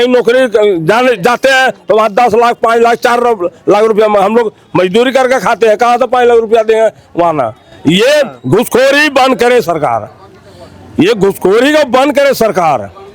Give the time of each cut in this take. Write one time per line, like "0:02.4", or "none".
none

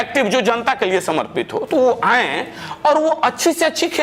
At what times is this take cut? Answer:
none

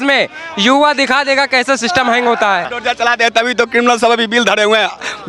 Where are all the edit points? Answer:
0:02.7

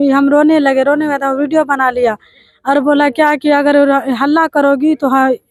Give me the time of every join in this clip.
none

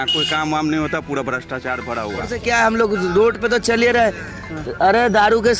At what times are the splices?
0:02.4

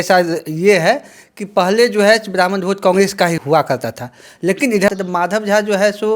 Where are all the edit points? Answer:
0:04.9

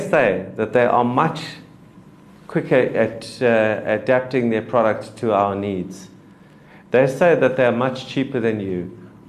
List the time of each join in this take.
none

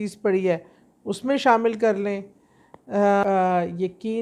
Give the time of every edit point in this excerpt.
0:03.2

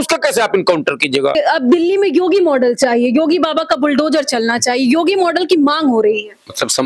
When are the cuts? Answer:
0:01.4

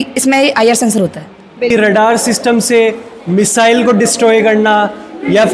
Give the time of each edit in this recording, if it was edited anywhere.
0:01.7

